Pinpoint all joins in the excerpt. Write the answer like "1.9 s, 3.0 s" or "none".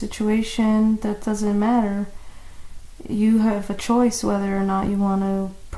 none

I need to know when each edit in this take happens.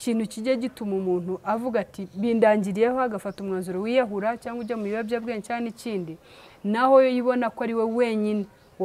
none

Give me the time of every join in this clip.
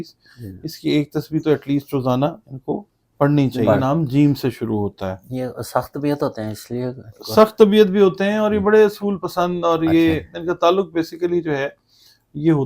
3.8 s

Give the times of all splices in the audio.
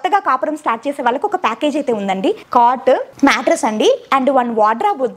2.4 s, 3.1 s

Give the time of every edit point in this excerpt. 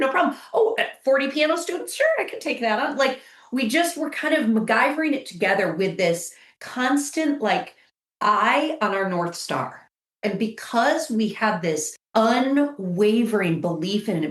10.0 s, 12.0 s

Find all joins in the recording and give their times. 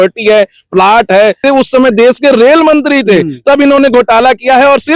1.4 s

